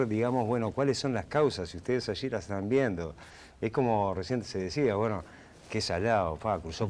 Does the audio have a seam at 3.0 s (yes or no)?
no